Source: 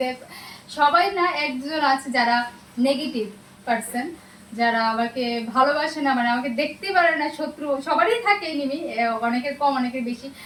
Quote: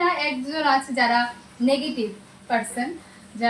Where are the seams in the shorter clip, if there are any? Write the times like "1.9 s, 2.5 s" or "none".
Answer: none